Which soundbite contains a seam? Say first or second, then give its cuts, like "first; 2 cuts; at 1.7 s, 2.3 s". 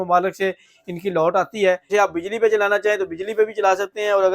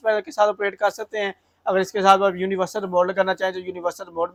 first; 1 cut; at 1.9 s